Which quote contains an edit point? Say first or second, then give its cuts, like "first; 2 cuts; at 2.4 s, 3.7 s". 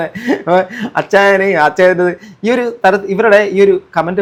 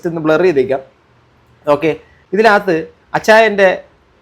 second; 1 cut; at 2.1 s